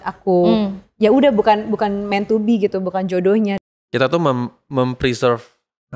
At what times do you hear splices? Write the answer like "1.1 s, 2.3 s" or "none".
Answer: 3.6 s